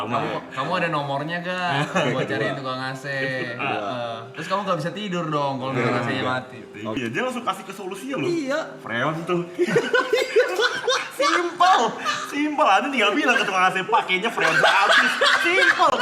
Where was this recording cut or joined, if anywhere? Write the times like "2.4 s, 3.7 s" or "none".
7.0 s